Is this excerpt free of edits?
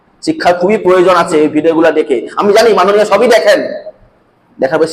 yes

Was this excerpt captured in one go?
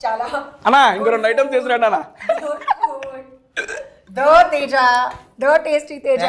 yes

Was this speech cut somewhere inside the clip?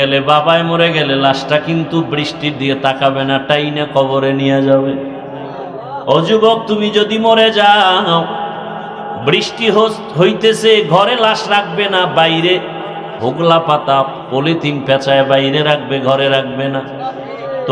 no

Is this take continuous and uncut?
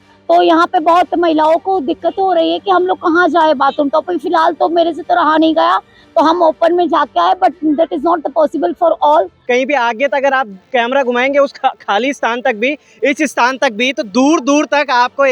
no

